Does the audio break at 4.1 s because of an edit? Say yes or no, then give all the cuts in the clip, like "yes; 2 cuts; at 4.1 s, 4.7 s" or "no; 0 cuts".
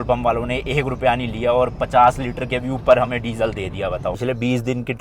yes; 1 cut; at 4.1 s